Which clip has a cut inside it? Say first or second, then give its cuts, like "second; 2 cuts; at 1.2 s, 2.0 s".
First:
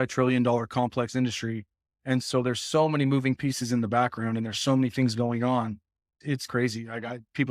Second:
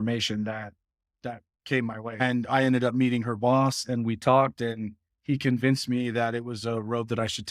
second; 1 cut; at 2.2 s